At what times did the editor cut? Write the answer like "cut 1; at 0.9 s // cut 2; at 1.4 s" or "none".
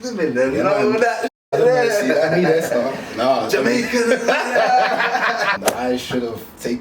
cut 1; at 5.6 s